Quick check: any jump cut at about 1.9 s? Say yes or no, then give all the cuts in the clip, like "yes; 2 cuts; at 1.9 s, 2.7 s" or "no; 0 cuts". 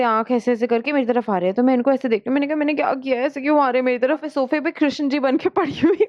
no; 1 cut; at 4.3 s